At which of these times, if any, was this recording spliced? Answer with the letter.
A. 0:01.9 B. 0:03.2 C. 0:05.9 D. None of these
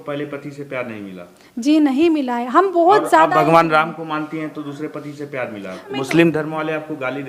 C